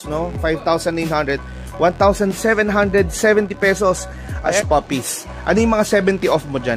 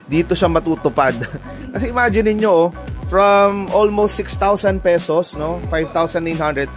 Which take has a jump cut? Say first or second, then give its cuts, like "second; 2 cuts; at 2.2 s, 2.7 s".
first; 1 cut; at 4.6 s